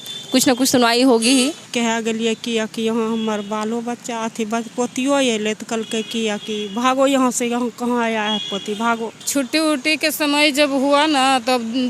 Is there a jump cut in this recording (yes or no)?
yes